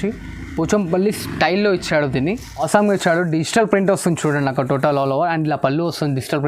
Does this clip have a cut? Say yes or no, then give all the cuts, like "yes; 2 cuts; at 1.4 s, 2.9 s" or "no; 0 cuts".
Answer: yes; 1 cut; at 2.6 s